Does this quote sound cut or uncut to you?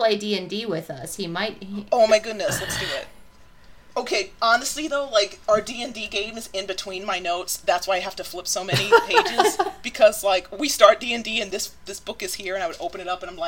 uncut